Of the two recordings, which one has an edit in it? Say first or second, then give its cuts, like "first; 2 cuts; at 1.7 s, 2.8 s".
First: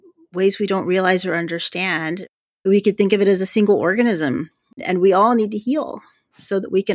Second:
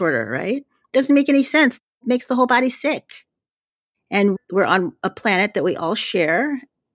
second; 2 cuts; at 1.9 s, 3.4 s